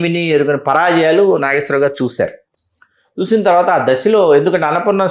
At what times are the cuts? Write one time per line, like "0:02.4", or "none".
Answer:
none

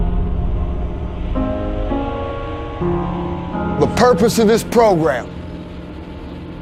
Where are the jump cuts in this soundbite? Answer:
none

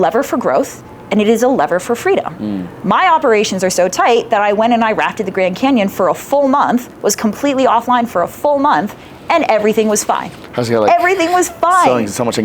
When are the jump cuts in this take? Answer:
none

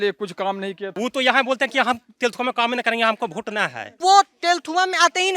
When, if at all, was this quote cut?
0:01.0

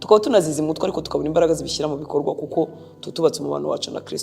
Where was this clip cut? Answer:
none

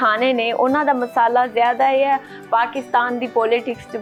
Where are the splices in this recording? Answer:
none

